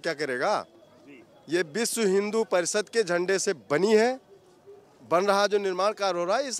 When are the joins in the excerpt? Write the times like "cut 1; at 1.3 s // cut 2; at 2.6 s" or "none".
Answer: none